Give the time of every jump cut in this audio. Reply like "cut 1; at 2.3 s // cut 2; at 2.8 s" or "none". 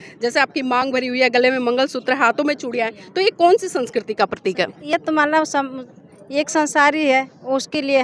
none